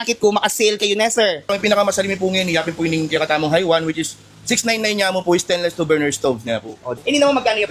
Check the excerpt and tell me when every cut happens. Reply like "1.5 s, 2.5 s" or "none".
1.5 s, 7.0 s